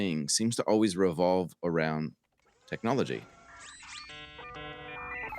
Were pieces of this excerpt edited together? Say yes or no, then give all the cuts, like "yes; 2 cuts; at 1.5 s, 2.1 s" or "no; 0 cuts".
yes; 1 cut; at 3.9 s